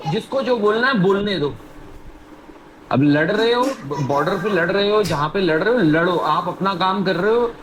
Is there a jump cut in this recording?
no; 0 cuts

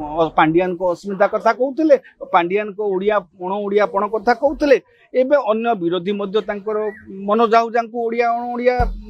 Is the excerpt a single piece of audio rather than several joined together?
yes; 0 cuts

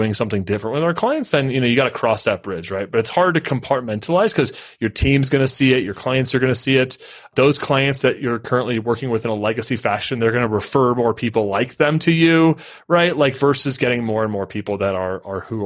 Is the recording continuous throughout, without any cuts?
yes; 0 cuts

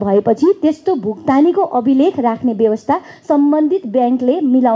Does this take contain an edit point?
no; 0 cuts

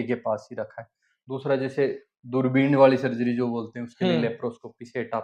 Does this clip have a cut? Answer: no; 0 cuts

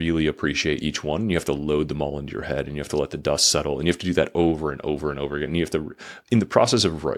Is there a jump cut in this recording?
no; 0 cuts

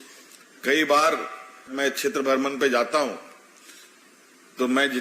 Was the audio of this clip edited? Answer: yes; 1 cut; at 1.7 s

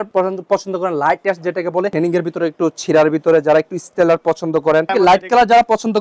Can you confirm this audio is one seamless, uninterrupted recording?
no; 2 cuts; at 1.9 s, 4.9 s

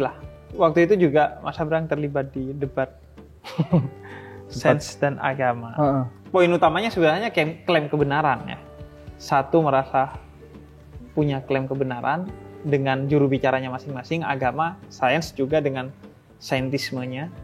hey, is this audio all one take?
no; 1 cut; at 6.2 s

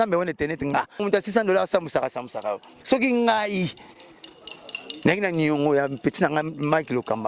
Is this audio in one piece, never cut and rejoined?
no; 1 cut; at 1.0 s

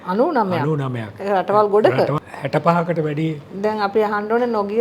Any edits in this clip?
yes; 1 cut; at 2.2 s

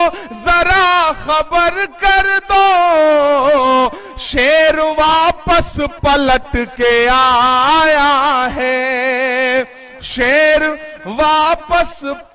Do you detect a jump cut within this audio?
no; 0 cuts

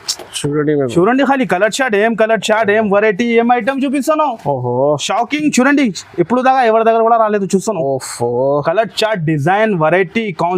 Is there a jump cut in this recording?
no; 0 cuts

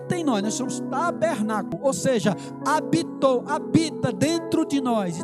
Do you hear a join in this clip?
yes; 1 cut; at 1.8 s

